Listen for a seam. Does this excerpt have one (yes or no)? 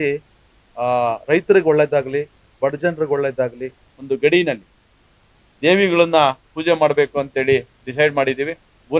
yes